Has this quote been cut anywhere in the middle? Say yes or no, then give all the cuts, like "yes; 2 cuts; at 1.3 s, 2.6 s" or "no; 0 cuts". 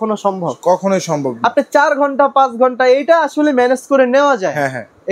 no; 0 cuts